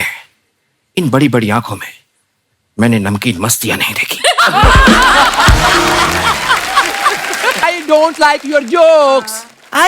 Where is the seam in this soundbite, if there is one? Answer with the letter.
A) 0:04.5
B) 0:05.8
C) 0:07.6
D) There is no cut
C